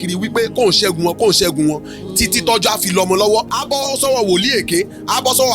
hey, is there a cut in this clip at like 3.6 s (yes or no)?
yes